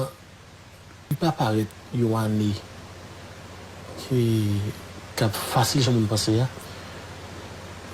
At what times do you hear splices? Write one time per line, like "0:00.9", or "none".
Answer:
0:01.1